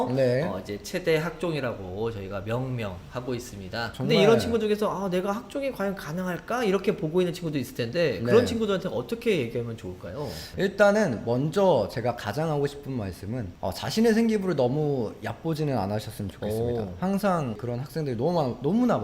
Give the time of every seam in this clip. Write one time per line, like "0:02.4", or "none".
0:03.9
0:10.5
0:13.5
0:17.6